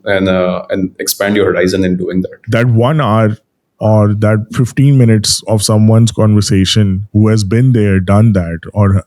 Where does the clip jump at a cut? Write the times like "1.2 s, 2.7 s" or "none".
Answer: 2.4 s